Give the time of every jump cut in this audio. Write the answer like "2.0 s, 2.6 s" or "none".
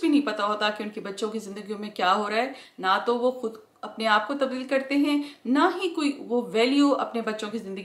2.6 s